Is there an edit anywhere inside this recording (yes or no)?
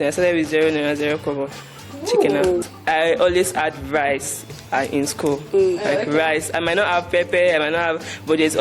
yes